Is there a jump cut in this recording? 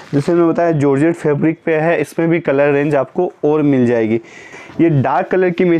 yes; 1 cut; at 4.6 s

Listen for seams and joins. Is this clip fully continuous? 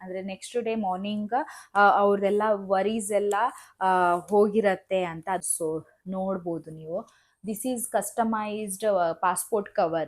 no; 1 cut; at 5.5 s

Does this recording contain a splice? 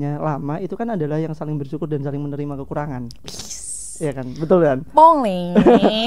no; 0 cuts

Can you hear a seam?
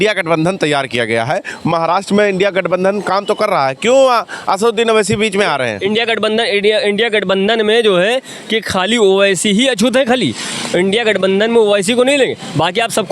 no; 0 cuts

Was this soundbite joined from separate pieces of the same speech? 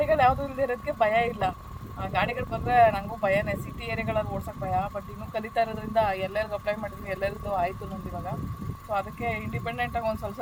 no; 0 cuts

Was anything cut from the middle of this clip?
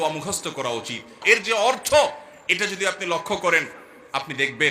yes; 1 cut; at 1.2 s

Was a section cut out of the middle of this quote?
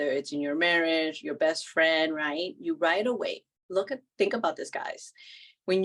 no; 0 cuts

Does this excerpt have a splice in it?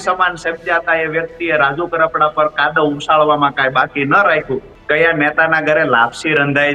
yes; 1 cut; at 4.7 s

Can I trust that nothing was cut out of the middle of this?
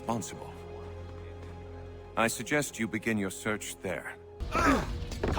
no; 1 cut; at 4.4 s

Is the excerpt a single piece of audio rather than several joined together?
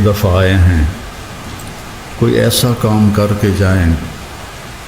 yes; 0 cuts

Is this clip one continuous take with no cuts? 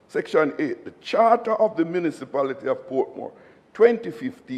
yes; 0 cuts

